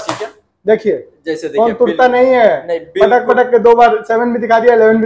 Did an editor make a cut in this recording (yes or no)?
no